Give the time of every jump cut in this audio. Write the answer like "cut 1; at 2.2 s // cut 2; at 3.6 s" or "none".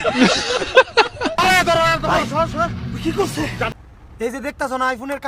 cut 1; at 1.2 s